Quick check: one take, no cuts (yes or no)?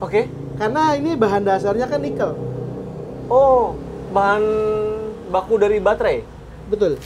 yes